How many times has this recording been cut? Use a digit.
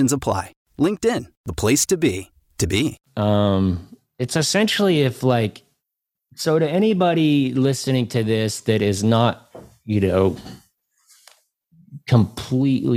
0